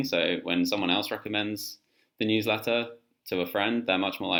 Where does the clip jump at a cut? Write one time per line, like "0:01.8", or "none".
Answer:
none